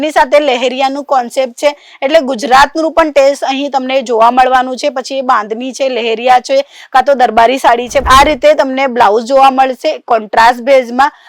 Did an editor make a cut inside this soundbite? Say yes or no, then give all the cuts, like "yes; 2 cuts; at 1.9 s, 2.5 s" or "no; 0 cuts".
yes; 1 cut; at 8.0 s